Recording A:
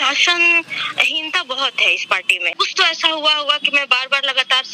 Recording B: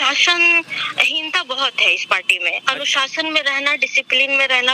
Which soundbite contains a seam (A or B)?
A